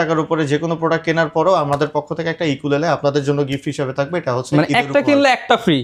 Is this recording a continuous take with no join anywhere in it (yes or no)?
yes